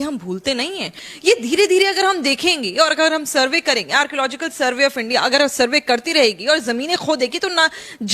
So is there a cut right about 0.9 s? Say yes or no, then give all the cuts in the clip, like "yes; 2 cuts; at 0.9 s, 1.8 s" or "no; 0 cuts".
yes; 1 cut; at 0.9 s